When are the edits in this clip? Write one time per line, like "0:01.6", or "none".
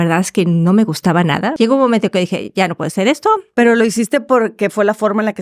0:01.5